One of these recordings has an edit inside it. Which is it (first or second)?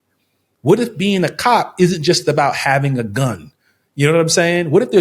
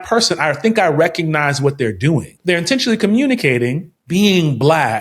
second